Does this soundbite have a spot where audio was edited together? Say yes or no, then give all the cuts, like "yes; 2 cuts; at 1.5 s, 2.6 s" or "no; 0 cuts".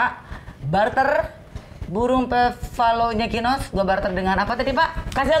no; 0 cuts